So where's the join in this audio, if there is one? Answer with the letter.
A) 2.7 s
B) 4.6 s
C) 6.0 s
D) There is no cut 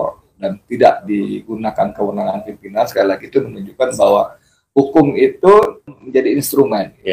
C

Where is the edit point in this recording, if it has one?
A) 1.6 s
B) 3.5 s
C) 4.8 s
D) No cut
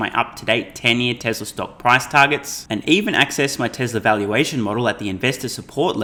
D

